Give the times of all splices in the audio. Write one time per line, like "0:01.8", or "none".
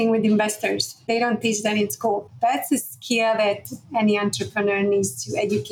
0:01.1
0:02.3